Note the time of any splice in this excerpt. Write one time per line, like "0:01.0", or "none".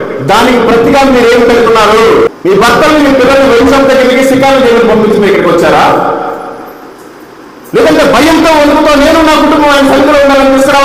0:02.3